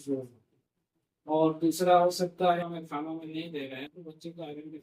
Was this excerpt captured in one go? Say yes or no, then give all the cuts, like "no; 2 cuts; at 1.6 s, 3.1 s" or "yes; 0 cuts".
no; 1 cut; at 2.6 s